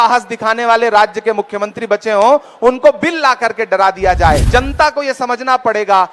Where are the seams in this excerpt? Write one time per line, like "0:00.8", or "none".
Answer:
0:04.4